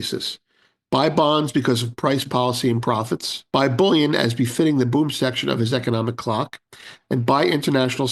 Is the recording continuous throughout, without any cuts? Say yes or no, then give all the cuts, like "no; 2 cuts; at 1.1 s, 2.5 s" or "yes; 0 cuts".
no; 1 cut; at 3.3 s